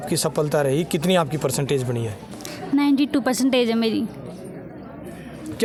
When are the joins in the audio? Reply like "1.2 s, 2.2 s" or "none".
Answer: none